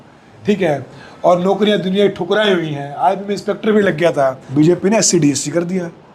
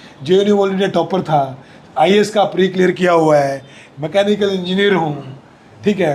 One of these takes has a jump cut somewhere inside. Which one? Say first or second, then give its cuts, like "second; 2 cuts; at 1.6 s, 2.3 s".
first; 1 cut; at 4.4 s